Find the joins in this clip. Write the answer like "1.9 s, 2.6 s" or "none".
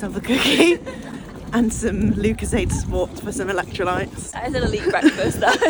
none